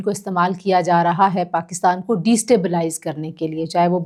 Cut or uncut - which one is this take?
uncut